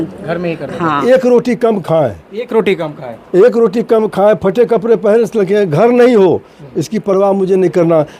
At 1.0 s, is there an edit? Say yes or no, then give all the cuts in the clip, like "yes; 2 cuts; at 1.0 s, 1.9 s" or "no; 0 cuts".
yes; 1 cut; at 1.0 s